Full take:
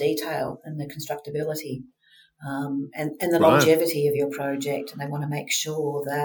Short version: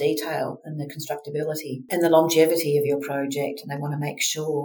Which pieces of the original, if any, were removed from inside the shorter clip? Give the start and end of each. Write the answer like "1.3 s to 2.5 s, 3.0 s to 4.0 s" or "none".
1.9 s to 3.1 s